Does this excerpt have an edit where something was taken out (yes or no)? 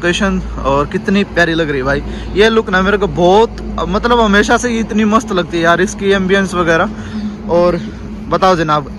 no